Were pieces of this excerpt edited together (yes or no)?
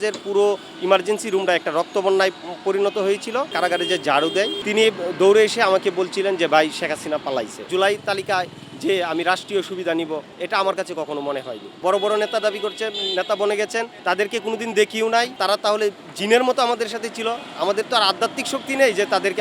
yes